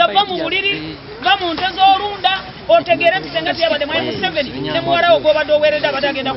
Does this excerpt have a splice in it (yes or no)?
no